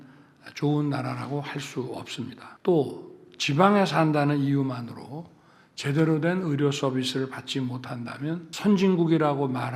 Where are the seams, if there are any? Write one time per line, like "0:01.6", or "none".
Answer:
0:02.5
0:08.5